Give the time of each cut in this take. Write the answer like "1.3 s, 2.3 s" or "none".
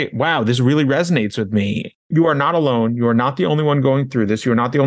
2.1 s

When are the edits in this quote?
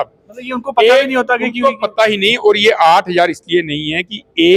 none

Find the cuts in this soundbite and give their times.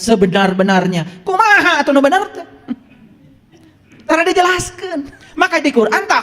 5.2 s

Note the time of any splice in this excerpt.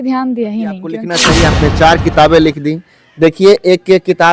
1.1 s

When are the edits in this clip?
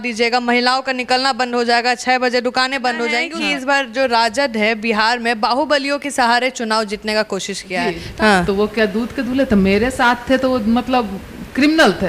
3.3 s, 8.0 s

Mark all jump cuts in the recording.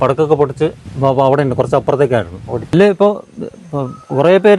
0.9 s, 2.7 s

